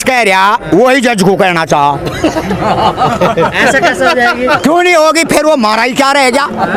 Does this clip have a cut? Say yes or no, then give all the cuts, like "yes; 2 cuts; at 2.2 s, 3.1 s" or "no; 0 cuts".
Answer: no; 0 cuts